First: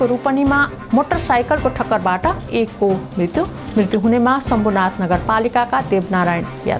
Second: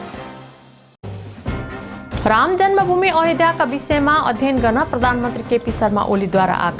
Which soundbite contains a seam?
second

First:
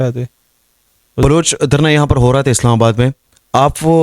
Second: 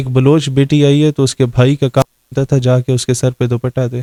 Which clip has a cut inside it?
first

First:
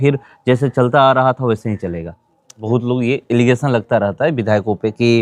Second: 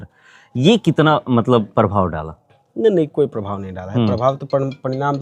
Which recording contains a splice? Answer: first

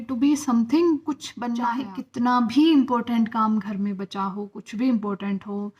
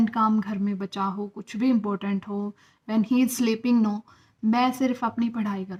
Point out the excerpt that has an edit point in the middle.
first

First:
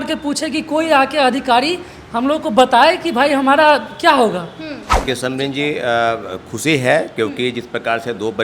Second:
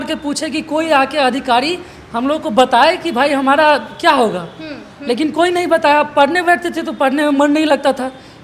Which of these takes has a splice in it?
first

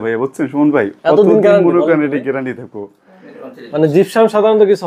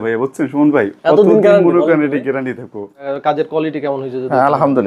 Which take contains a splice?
second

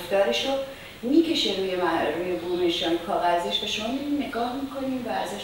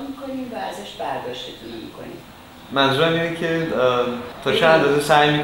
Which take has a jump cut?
second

